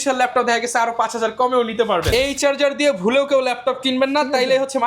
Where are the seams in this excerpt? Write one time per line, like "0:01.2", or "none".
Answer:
0:02.1

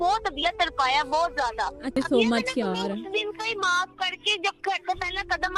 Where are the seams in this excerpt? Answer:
0:01.9

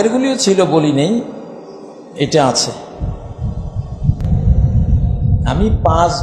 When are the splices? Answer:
0:04.2

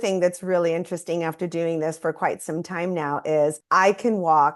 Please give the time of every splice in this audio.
0:03.6

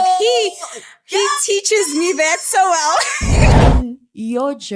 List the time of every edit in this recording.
0:03.6

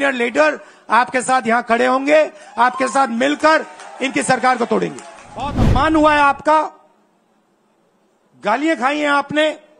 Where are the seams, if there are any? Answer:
0:05.6

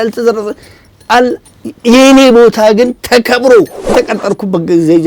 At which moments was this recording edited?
0:03.9

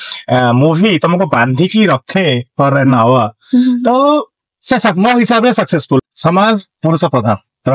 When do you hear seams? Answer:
0:06.0

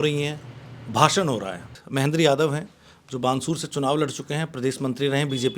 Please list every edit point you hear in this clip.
0:01.8

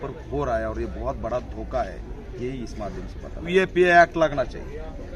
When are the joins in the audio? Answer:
0:03.5

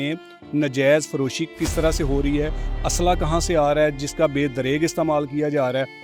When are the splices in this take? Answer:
0:01.4

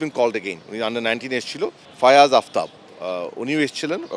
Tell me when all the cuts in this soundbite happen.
0:01.8

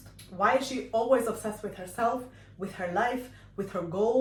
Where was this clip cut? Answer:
none

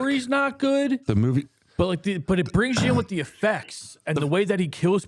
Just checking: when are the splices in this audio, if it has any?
none

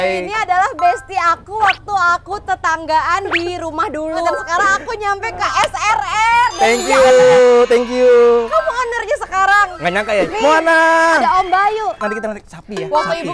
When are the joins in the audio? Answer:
0:04.3
0:10.3

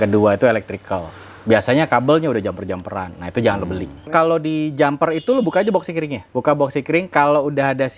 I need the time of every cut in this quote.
0:04.0
0:06.2

